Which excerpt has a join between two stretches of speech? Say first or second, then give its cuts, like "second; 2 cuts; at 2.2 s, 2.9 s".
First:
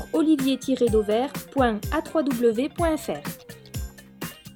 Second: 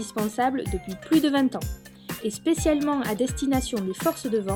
first; 1 cut; at 3.2 s